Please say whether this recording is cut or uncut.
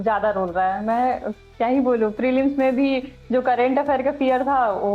uncut